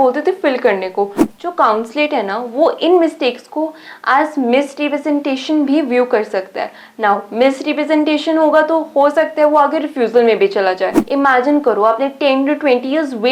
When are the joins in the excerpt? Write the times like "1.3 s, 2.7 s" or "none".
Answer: 1.2 s, 11.0 s